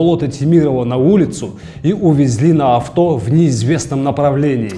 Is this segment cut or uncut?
uncut